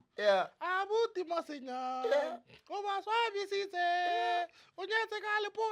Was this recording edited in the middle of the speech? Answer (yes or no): no